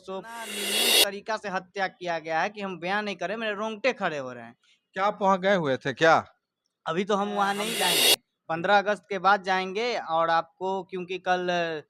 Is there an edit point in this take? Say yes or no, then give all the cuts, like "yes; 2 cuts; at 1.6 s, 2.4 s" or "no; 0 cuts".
yes; 2 cuts; at 0.8 s, 7.9 s